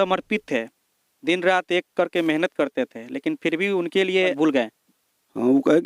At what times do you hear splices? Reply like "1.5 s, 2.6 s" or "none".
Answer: 4.3 s